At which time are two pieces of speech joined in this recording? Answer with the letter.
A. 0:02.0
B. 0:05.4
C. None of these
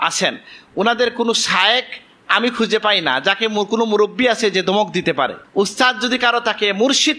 B